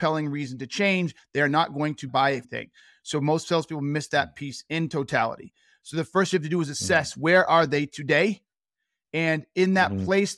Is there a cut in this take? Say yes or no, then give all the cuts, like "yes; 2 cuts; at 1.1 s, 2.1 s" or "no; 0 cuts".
yes; 1 cut; at 2.1 s